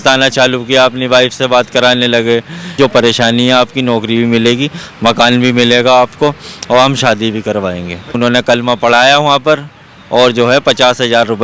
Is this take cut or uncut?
cut